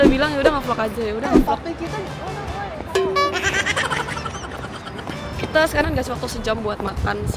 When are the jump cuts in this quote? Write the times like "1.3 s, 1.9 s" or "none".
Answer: none